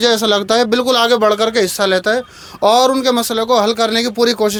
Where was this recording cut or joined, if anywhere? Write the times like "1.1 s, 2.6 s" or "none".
none